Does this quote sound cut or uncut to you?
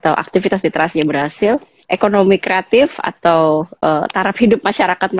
cut